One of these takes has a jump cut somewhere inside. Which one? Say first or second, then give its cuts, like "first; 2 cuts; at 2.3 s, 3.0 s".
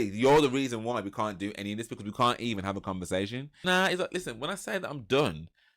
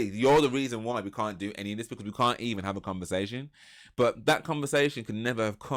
first; 1 cut; at 3.6 s